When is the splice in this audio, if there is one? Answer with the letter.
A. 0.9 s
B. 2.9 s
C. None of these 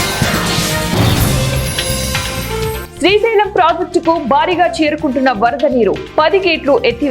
B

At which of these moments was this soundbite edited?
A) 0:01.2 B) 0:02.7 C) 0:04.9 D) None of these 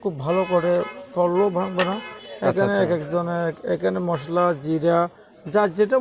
D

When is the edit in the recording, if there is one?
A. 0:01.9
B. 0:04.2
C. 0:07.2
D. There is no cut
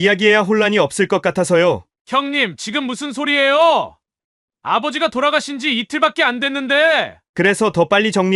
A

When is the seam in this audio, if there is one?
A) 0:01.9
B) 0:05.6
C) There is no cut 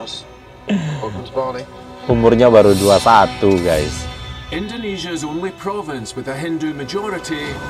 C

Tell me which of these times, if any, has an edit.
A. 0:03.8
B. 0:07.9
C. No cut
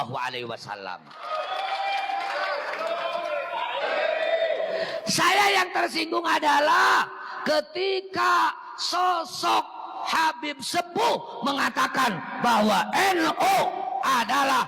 A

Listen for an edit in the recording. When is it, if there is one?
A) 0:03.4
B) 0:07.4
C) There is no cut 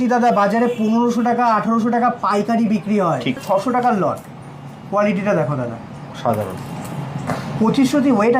A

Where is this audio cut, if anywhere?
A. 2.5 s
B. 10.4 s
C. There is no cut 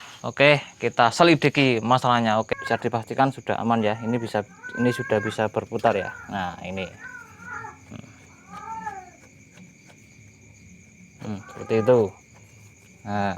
A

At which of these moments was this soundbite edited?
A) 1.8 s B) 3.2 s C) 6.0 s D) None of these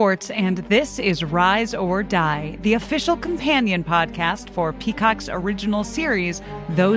D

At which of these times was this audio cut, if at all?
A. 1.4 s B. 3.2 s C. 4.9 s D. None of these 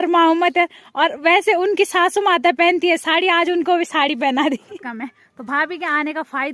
C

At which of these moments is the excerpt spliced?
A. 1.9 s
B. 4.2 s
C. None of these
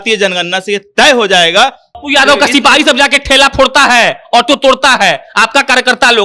A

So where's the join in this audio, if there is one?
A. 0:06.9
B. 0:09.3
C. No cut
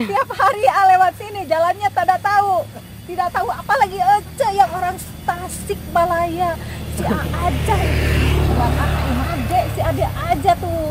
B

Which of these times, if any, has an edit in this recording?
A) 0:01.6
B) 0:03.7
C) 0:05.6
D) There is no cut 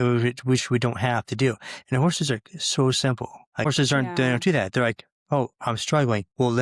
B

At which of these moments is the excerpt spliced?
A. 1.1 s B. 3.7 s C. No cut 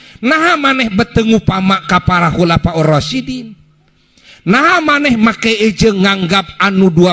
C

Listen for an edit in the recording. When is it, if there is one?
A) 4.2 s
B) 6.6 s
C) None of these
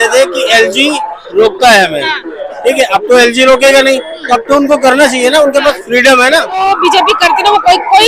B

